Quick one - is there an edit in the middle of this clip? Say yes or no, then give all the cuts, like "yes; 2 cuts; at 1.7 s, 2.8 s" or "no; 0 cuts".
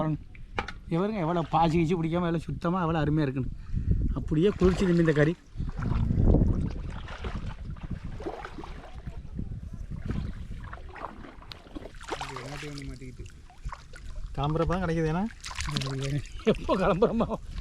no; 0 cuts